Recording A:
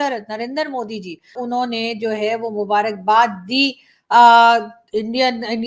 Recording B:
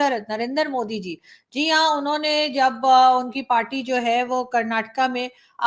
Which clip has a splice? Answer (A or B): A